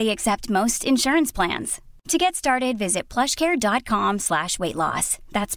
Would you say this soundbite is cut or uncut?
uncut